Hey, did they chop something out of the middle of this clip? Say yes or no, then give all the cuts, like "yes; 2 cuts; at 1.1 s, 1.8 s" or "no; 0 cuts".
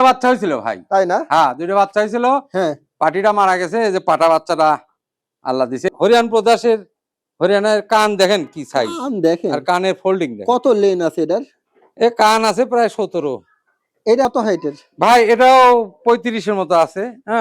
yes; 2 cuts; at 5.9 s, 14.2 s